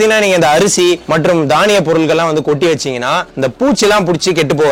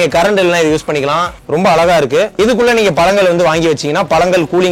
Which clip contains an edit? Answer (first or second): second